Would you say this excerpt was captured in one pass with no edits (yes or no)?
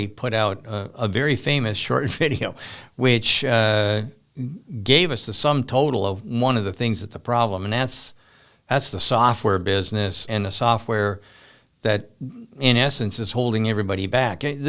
no